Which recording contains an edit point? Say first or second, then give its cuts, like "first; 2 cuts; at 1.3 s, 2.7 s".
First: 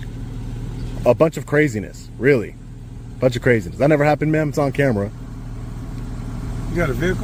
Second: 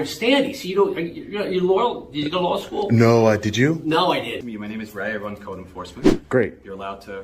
second; 1 cut; at 4.4 s